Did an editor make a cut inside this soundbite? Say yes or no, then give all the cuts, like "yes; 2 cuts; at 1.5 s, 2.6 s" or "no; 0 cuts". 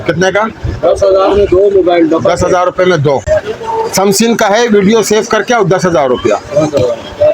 yes; 1 cut; at 3.2 s